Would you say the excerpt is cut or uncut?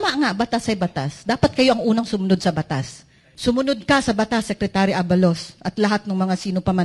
cut